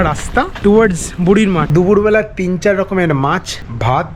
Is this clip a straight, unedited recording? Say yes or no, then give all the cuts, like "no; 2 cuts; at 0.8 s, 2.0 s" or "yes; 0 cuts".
no; 1 cut; at 1.7 s